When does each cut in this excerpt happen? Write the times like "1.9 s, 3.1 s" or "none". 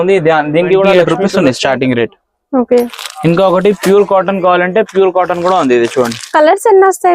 1.0 s